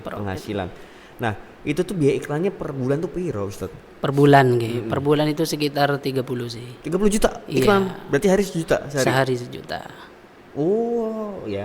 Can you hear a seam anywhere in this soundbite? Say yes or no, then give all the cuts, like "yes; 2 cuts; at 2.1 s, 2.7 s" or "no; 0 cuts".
no; 0 cuts